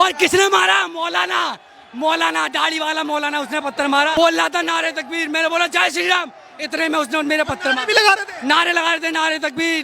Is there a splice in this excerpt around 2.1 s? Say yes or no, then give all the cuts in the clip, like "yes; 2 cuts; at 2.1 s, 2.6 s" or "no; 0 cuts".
no; 1 cut; at 4.1 s